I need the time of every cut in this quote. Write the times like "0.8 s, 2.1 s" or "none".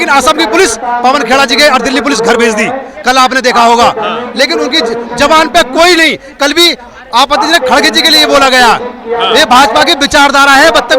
none